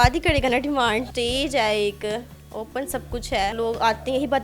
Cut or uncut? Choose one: cut